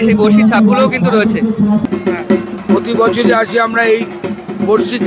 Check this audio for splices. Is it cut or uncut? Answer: cut